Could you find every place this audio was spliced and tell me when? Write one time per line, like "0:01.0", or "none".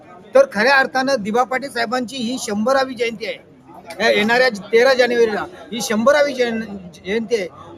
none